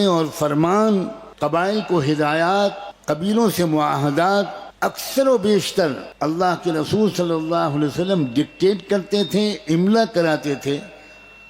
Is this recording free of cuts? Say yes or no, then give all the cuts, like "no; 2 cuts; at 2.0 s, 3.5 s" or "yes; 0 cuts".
no; 4 cuts; at 1.2 s, 2.9 s, 4.6 s, 6.1 s